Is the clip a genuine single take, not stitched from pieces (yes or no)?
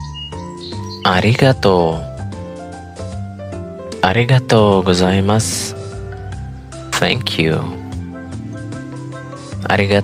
no